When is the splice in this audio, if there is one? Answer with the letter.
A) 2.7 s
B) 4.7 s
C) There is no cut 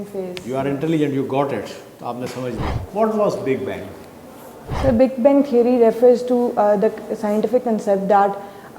A